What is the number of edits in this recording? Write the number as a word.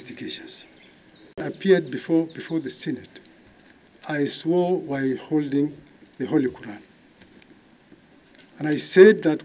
one